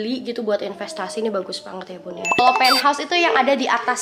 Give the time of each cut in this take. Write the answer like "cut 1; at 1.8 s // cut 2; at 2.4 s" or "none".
cut 1; at 2.3 s